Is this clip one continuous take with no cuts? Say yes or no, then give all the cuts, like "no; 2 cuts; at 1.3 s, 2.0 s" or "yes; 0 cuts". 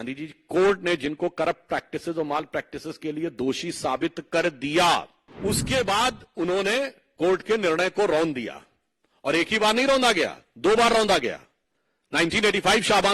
no; 1 cut; at 5.2 s